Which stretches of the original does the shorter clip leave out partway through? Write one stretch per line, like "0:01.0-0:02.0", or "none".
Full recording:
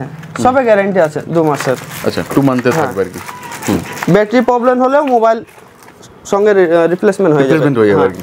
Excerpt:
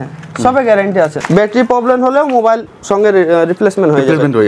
0:01.2-0:04.0
0:05.5-0:06.2